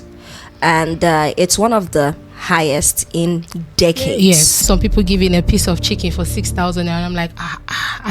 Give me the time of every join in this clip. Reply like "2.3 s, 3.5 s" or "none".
4.6 s